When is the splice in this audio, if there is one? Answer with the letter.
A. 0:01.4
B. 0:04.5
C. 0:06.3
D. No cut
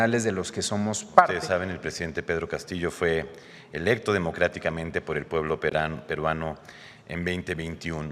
A